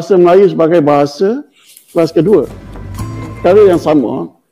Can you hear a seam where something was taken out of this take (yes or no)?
yes